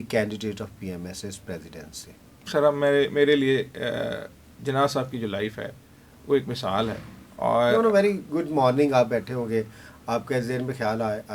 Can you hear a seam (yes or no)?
no